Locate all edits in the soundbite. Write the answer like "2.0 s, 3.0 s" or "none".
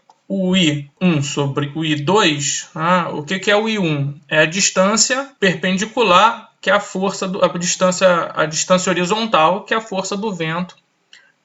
0.9 s, 5.3 s